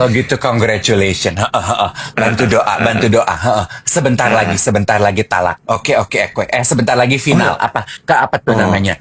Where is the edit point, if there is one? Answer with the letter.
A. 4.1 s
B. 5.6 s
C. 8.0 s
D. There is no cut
D